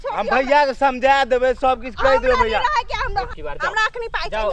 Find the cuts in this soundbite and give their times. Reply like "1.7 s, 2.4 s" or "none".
3.3 s